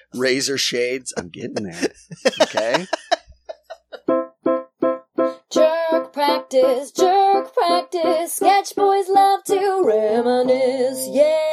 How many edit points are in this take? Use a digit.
1